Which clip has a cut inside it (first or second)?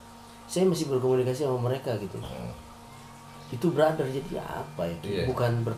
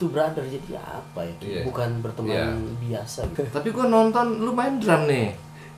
second